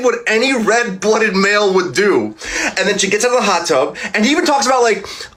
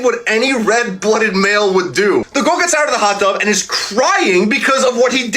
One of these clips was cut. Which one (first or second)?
second